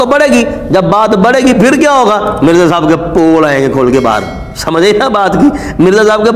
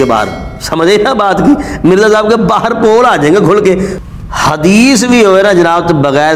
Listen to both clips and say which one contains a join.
second; 1 cut; at 3.9 s

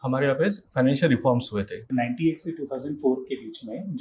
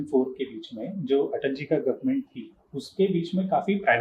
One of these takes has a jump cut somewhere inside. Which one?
first; 1 cut; at 1.9 s

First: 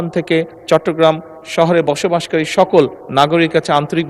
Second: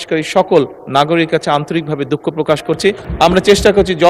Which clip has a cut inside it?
second; 1 cut; at 3.0 s

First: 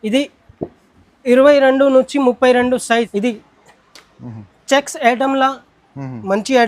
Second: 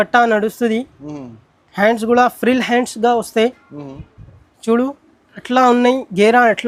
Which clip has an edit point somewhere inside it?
first; 1 cut; at 3.1 s

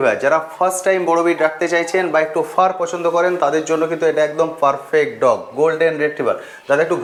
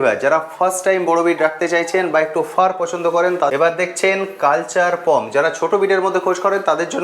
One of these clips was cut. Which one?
second; 1 cut; at 3.5 s

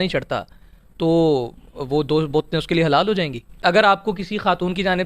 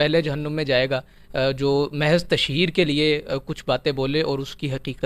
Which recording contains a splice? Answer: first; 1 cut; at 3.6 s

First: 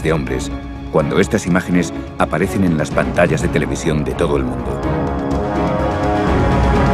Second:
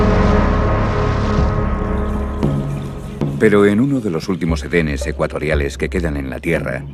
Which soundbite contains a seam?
first; 1 cut; at 3.9 s

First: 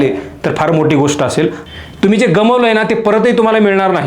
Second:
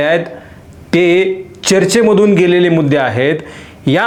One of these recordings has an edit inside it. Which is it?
first; 1 cut; at 1.6 s

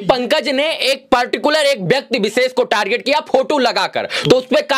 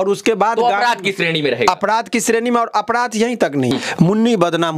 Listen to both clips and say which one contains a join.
second; 1 cut; at 3.7 s

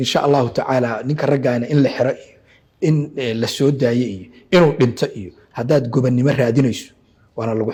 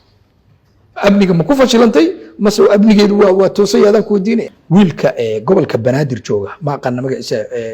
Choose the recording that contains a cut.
second; 1 cut; at 4.5 s

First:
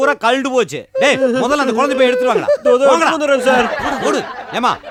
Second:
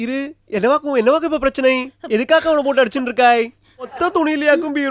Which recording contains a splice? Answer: second; 1 cut; at 3.9 s

